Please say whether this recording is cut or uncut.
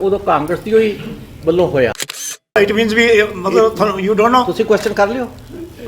cut